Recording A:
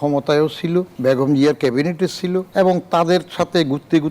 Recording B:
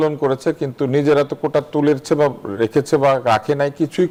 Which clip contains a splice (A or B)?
A